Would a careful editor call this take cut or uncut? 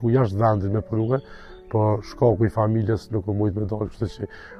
uncut